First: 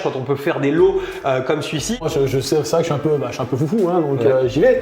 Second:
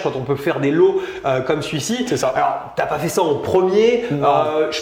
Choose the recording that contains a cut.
first; 1 cut; at 2.0 s

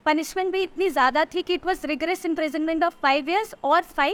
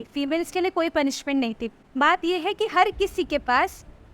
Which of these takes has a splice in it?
second; 1 cut; at 1.9 s

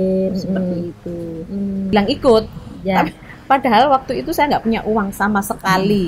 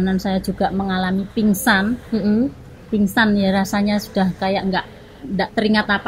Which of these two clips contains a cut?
first; 1 cut; at 1.9 s

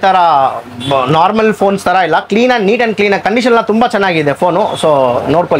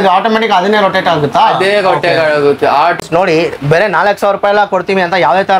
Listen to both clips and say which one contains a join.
second; 1 cut; at 3.0 s

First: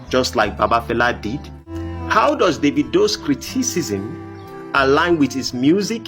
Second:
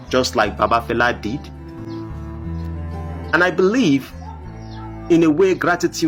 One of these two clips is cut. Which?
first; 1 cut; at 1.7 s

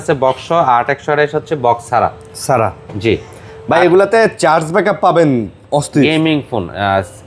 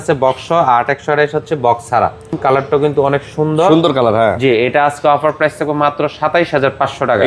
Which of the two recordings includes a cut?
second; 1 cut; at 2.4 s

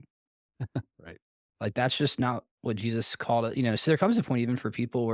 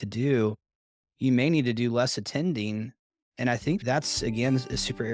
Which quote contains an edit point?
second; 1 cut; at 3.8 s

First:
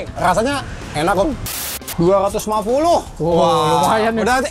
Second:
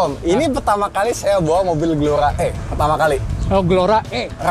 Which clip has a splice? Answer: first; 1 cut; at 1.6 s

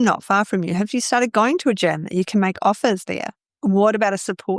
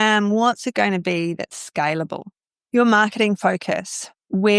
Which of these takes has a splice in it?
first; 1 cut; at 3.5 s

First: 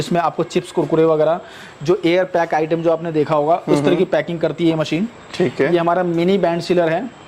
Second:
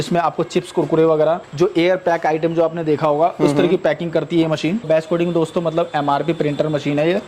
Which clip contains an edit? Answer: second; 2 cuts; at 1.5 s, 4.9 s

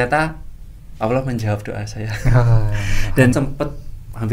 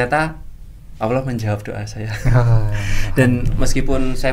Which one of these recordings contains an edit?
first; 1 cut; at 3.3 s

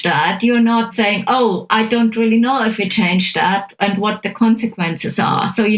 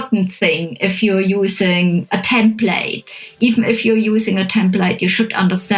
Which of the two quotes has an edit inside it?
first; 1 cut; at 0.9 s

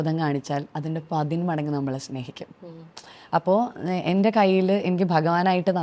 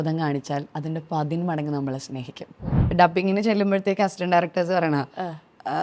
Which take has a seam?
second; 1 cut; at 2.9 s

